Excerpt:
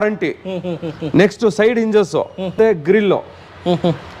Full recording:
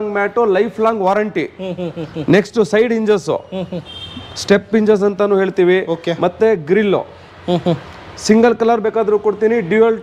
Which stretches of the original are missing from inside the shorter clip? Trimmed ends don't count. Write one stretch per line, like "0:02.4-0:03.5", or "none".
0:03.7-0:06.3